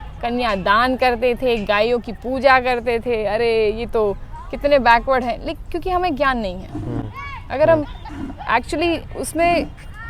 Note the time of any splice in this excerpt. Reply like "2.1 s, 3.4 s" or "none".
none